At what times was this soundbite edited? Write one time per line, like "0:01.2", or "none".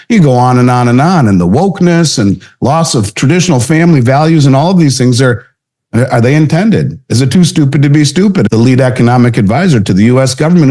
0:08.5